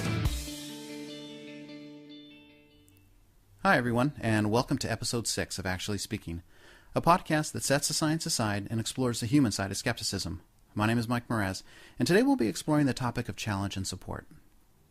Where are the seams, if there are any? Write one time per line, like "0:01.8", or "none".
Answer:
0:11.8